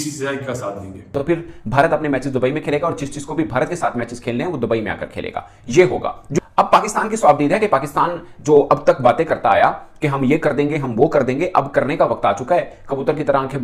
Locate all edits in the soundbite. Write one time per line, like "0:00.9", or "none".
0:01.1